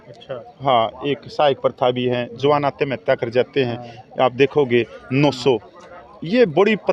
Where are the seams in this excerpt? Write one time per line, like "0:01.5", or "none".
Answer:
none